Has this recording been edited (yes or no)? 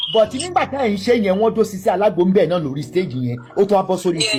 no